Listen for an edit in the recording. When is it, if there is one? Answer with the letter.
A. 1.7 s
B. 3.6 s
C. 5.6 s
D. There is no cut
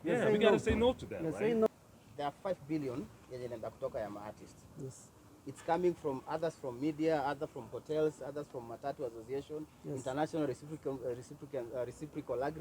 A